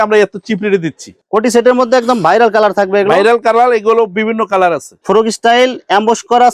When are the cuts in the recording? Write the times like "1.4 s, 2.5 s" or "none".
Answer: 1.1 s, 4.9 s